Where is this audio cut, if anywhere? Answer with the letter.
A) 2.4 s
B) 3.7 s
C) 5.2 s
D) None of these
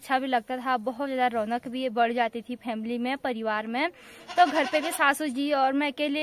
D